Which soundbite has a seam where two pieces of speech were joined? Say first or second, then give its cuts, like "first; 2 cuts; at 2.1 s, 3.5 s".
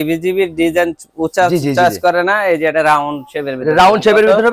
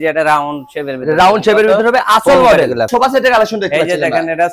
second; 1 cut; at 2.9 s